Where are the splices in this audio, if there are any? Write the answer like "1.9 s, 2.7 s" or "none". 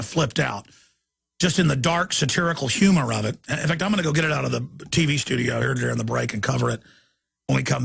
7.0 s